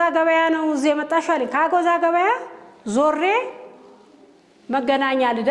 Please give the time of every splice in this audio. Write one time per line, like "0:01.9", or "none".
none